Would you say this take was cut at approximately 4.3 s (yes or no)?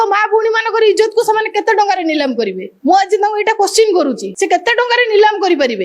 yes